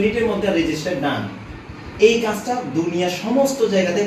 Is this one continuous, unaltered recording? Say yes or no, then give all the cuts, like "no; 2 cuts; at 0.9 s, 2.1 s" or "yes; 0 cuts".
yes; 0 cuts